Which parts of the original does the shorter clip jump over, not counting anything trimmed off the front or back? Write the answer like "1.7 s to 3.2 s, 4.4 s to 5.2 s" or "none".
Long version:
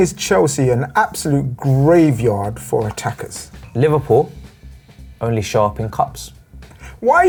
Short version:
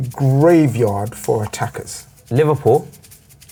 none